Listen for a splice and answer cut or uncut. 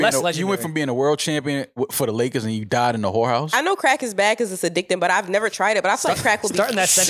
cut